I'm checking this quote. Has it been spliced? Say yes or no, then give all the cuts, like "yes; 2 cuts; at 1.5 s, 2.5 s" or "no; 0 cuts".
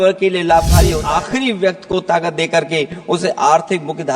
yes; 1 cut; at 1.0 s